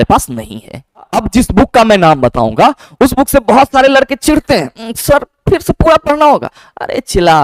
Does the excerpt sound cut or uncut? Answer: cut